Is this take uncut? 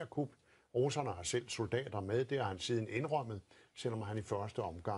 yes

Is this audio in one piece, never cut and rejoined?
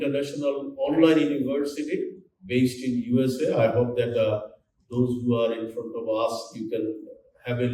yes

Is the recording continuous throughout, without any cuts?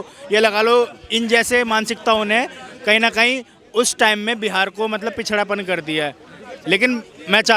yes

